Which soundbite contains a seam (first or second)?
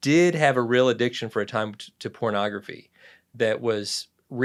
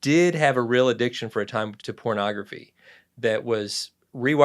second